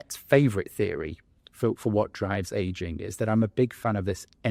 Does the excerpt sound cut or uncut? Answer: uncut